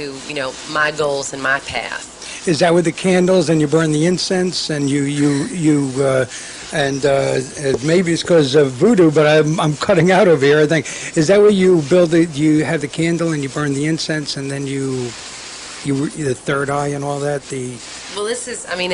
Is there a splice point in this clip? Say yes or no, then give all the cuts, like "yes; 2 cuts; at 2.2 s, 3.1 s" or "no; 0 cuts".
yes; 1 cut; at 8.5 s